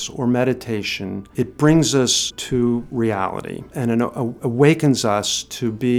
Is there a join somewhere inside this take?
yes; 3 cuts; at 1.2 s, 2.4 s, 3.7 s

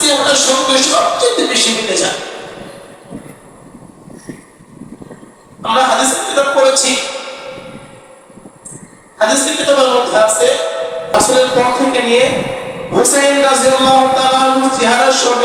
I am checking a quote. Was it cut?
no; 0 cuts

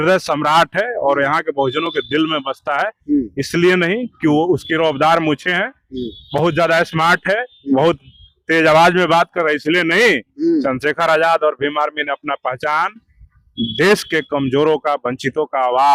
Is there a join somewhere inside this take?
no; 0 cuts

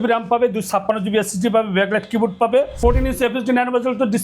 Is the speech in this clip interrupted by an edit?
yes; 1 cut; at 2.8 s

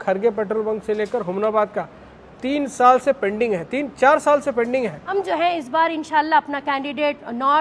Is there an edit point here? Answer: yes; 1 cut; at 5.0 s

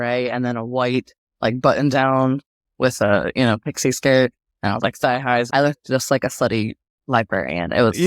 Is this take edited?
yes; 1 cut; at 5.5 s

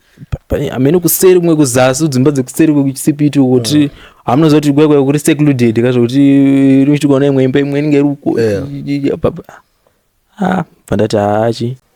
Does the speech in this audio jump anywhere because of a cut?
no; 0 cuts

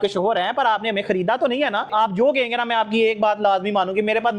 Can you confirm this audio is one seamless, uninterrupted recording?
no; 1 cut; at 1.9 s

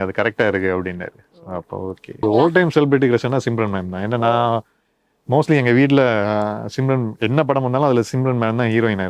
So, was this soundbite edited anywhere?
yes; 1 cut; at 2.2 s

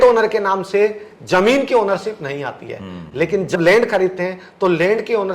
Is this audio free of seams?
no; 1 cut; at 3.5 s

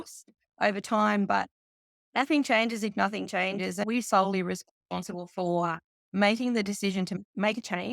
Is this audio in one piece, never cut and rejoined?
no; 2 cuts; at 3.8 s, 7.1 s

